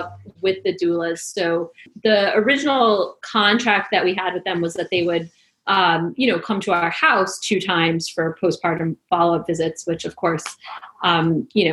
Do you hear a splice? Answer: yes; 1 cut; at 1.9 s

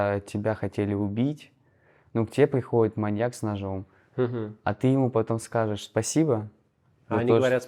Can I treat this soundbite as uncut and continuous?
yes; 0 cuts

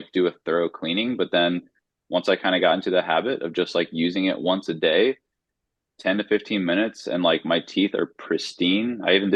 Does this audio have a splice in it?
no; 0 cuts

